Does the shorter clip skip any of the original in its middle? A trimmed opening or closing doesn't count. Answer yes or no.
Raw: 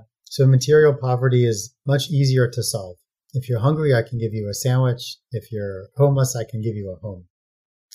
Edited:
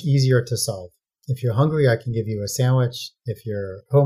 no